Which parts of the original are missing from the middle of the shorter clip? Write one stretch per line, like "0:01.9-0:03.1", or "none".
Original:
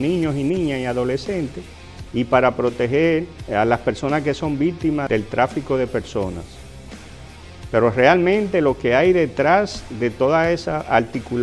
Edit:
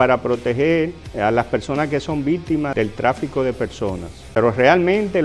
0:06.5-0:07.5